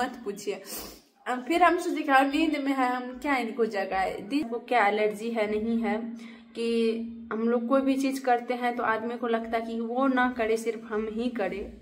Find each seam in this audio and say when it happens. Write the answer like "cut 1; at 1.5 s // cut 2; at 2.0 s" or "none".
cut 1; at 4.4 s